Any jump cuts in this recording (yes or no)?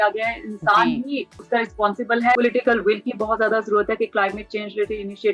yes